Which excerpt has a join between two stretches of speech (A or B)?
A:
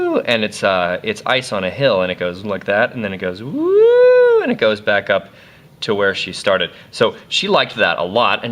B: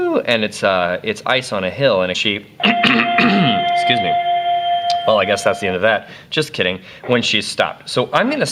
A